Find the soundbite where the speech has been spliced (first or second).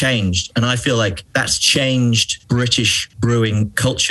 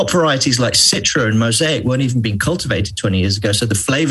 first